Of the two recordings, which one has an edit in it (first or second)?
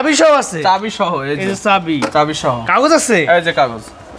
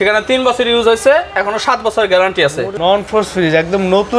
second